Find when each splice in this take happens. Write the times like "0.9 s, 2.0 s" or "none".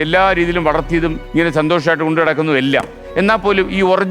1.2 s